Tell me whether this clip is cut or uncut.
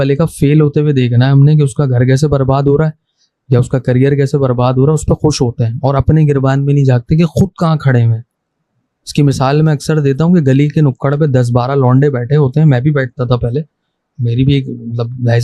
uncut